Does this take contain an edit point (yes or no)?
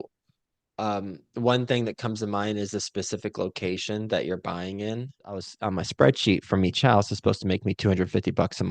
yes